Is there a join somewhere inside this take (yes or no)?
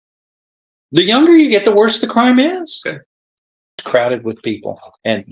yes